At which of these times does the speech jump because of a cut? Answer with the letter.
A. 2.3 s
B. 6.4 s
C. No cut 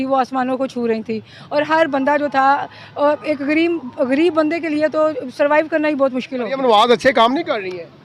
B